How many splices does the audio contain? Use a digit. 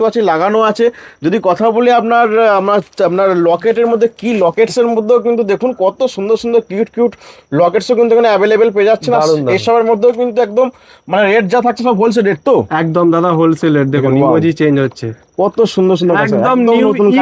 0